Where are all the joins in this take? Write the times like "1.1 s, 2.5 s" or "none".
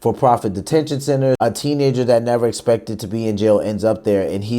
1.4 s